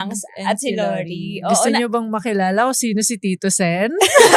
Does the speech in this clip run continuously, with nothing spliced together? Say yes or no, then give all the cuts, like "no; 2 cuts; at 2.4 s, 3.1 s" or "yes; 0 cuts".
yes; 0 cuts